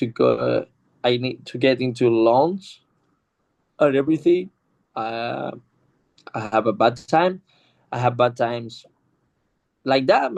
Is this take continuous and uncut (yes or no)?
yes